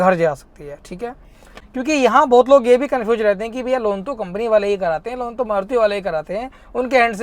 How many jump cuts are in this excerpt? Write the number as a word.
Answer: one